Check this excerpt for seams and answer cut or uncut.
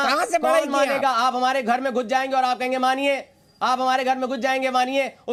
uncut